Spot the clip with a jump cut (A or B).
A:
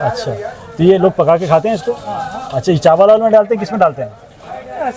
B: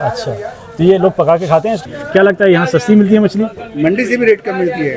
B